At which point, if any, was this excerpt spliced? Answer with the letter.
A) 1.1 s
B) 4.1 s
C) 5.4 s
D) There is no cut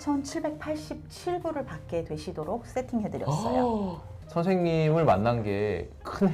B